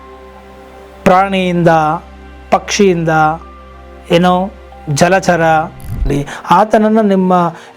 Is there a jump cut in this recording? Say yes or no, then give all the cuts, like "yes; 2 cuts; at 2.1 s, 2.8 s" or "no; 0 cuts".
yes; 1 cut; at 6.1 s